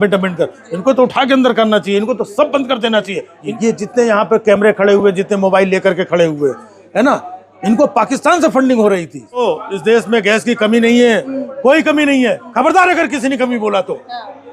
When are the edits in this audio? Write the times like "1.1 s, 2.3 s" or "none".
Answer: 3.5 s, 9.4 s